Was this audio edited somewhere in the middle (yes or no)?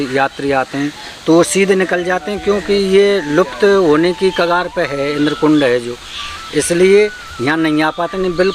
no